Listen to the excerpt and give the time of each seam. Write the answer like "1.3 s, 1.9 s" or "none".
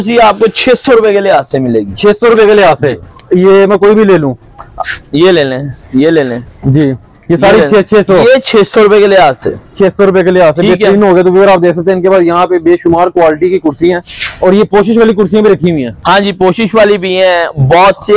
none